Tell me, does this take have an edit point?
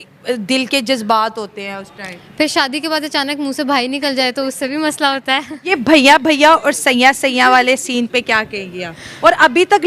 yes; 1 cut; at 5.8 s

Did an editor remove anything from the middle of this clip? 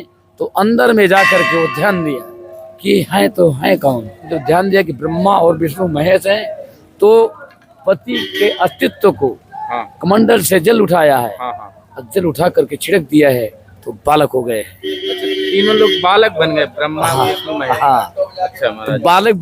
yes; 1 cut; at 4.3 s

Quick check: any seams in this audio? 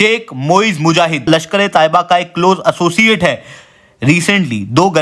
yes; 1 cut; at 1.3 s

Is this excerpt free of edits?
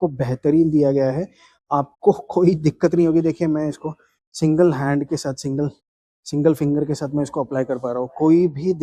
yes; 0 cuts

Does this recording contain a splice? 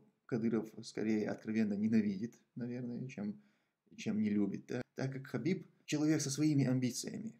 yes; 2 cuts; at 4.9 s, 5.7 s

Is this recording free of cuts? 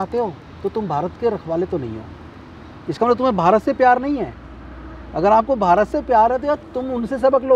yes; 0 cuts

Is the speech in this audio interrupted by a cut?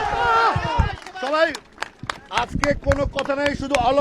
no; 0 cuts

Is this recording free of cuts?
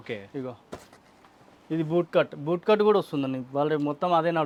yes; 0 cuts

